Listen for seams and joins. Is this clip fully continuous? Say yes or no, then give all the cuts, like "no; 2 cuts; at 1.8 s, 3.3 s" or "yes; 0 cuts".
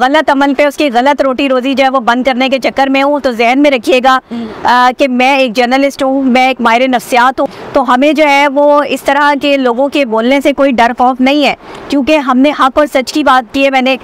no; 1 cut; at 7.5 s